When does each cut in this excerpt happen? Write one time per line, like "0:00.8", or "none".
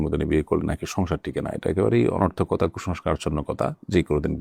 none